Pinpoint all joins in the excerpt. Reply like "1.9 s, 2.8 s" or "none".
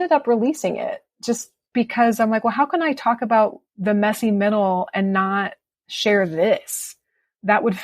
3.7 s

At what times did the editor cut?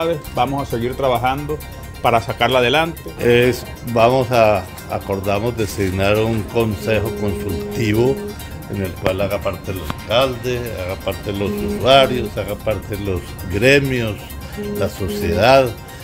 3.0 s

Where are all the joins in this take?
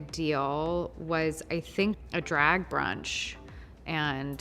2.0 s

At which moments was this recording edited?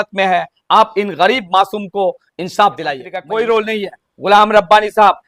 3.1 s

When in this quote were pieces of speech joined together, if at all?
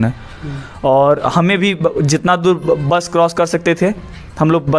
none

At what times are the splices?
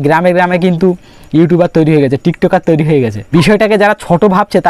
3.2 s

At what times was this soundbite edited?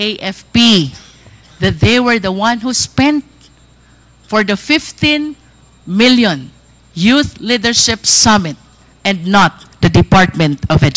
none

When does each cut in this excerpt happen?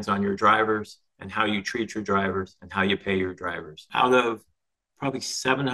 3.9 s

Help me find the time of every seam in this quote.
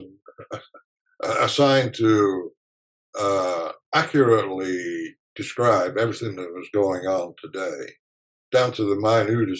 none

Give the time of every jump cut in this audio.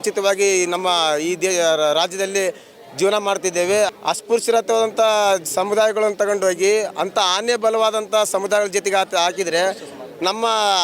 3.9 s

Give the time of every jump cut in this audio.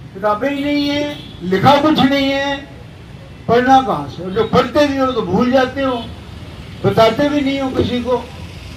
none

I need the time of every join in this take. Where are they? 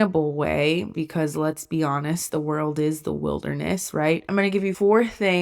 0.9 s, 4.4 s

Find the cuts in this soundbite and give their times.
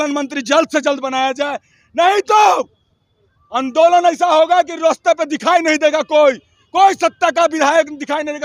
none

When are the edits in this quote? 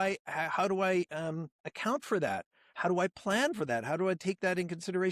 none

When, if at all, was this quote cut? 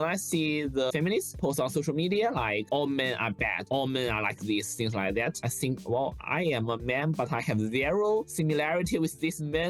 0.9 s

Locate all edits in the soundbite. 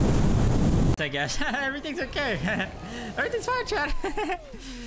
0.9 s

